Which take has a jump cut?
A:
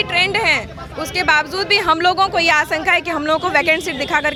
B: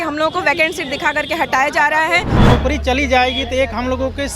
B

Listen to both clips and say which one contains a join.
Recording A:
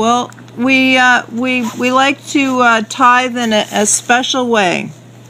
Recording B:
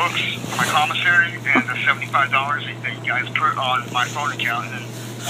A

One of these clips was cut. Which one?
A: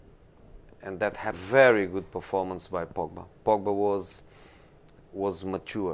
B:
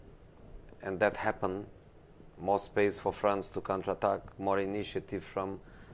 B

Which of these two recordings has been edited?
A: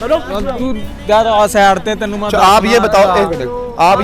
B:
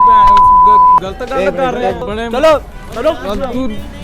B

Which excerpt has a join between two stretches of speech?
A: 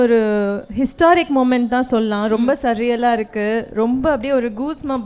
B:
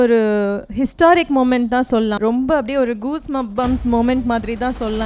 B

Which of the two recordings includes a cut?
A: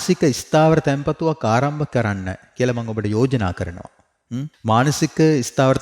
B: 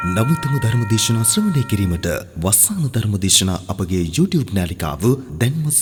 A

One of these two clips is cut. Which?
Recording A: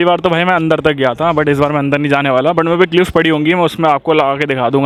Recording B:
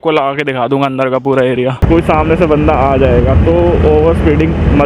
B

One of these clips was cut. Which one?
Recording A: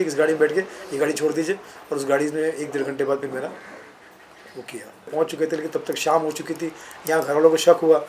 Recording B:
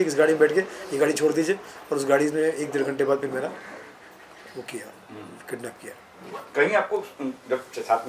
A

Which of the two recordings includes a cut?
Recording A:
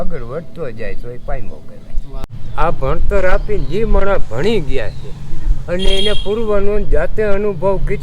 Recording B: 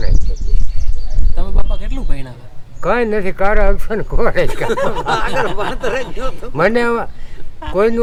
A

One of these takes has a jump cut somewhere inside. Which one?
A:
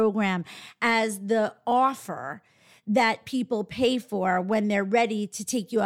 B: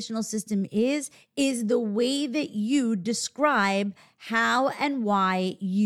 B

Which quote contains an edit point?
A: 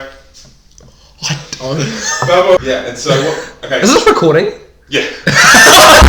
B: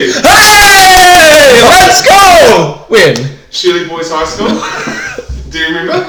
A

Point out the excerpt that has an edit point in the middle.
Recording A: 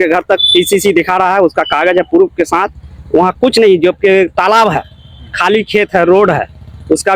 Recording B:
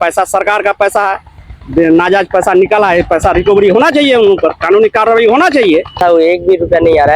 B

